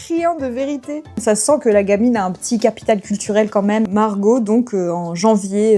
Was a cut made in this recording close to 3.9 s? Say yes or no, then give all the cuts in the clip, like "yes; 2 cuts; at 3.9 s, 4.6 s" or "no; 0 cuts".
yes; 2 cuts; at 1.2 s, 3.9 s